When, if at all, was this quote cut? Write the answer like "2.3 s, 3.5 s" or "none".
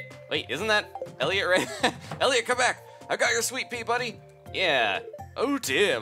none